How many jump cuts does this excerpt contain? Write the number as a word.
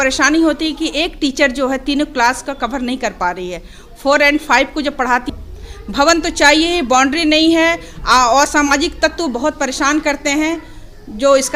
one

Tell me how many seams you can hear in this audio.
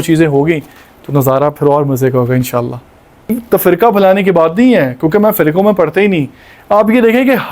one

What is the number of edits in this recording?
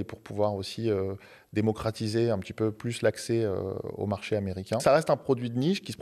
one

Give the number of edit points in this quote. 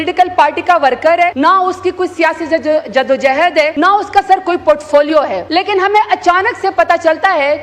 three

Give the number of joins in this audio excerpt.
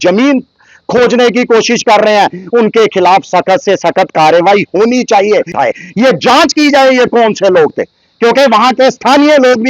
one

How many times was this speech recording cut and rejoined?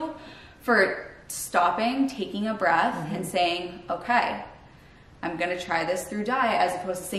zero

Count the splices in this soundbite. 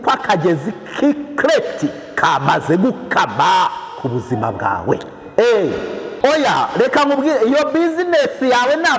one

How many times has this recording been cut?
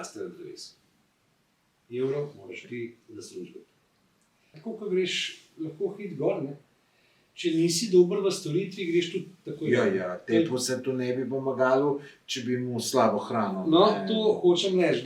one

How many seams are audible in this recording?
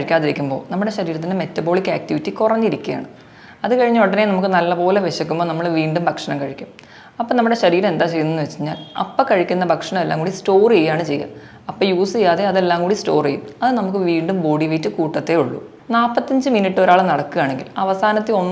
one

